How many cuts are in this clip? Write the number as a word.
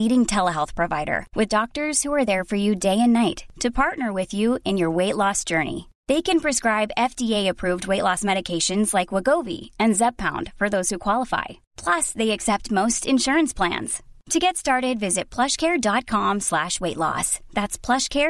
zero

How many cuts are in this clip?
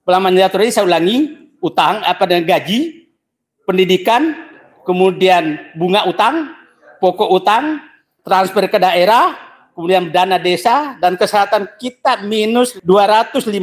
one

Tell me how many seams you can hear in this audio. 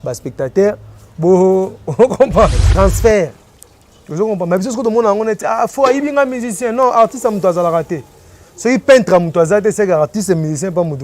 one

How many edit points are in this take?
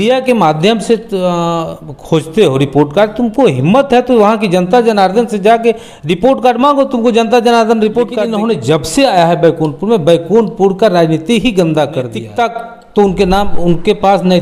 two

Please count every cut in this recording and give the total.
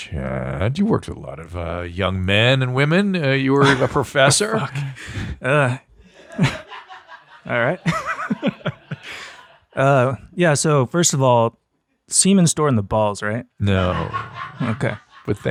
zero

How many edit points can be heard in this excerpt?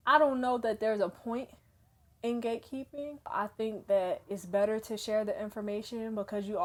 zero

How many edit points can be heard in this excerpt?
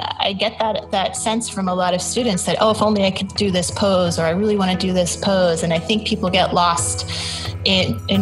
zero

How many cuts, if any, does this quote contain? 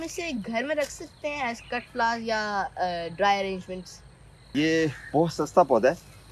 one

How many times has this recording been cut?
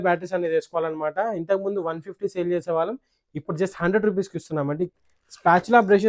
one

